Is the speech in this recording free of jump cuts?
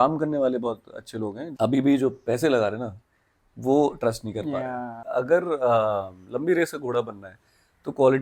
no; 2 cuts; at 1.4 s, 4.9 s

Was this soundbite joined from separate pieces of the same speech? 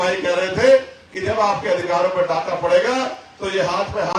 no; 0 cuts

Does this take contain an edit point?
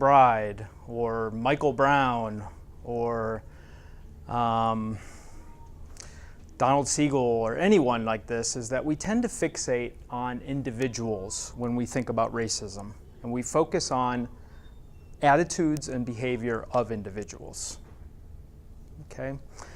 yes; 1 cut; at 3.0 s

